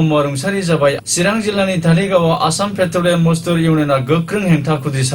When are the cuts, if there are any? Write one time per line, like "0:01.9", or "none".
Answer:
0:01.0